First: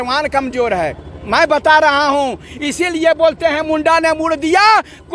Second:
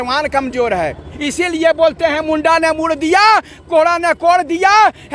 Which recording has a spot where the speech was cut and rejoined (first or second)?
second